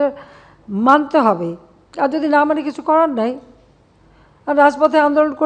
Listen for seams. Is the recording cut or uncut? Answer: uncut